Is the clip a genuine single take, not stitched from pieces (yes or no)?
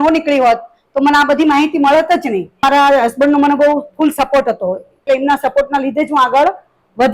no